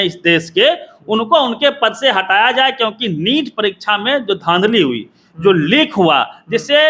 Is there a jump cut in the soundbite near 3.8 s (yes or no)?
no